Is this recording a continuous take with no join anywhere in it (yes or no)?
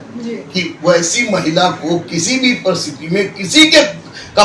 yes